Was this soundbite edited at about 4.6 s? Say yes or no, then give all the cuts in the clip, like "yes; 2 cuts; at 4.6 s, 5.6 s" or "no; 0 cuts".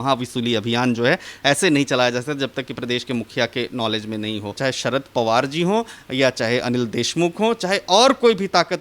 yes; 1 cut; at 4.6 s